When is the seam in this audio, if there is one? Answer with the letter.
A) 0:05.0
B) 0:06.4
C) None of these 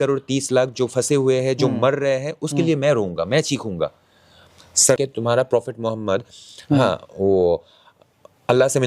A